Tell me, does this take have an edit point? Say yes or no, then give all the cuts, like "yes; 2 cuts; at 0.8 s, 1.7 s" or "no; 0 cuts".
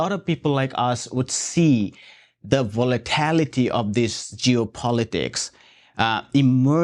no; 0 cuts